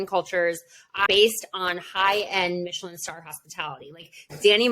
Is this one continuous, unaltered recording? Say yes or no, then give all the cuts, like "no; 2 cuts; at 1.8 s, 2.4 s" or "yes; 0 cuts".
no; 1 cut; at 1.0 s